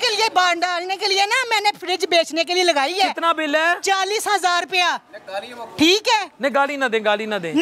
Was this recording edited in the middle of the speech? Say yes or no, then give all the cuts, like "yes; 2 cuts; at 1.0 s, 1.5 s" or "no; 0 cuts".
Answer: no; 0 cuts